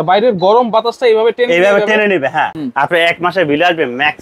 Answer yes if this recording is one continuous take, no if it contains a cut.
no